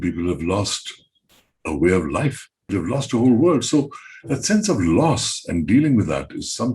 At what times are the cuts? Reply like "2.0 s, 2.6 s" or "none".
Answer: 2.7 s